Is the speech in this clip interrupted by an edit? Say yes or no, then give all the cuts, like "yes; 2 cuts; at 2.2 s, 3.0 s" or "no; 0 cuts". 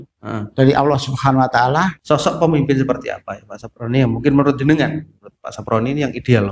yes; 1 cut; at 2.0 s